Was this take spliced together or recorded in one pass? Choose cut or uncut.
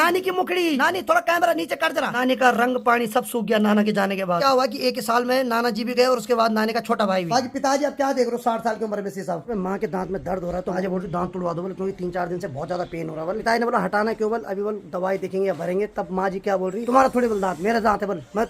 cut